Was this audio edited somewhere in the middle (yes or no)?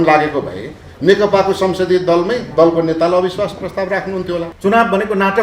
yes